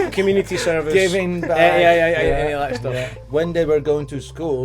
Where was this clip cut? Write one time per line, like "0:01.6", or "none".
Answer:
0:03.2

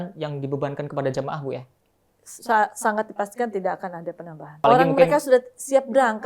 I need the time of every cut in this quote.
0:04.5

